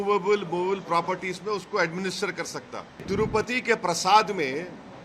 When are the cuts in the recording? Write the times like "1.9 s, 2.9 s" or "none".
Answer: 3.1 s

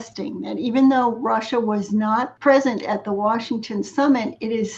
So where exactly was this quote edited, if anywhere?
2.3 s

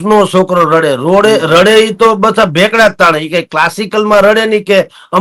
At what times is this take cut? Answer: none

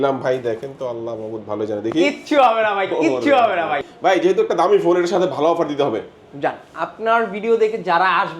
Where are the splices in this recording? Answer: 3.9 s

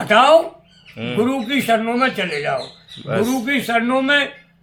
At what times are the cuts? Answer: none

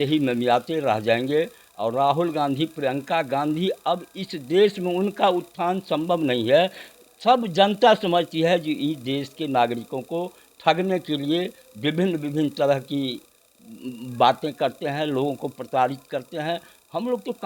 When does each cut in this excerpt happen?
none

